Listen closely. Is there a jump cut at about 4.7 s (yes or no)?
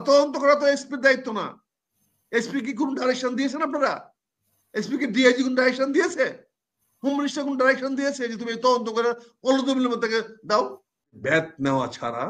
no